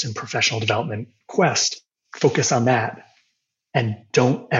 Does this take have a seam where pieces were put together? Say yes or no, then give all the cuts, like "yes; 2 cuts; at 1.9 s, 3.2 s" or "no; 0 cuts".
no; 0 cuts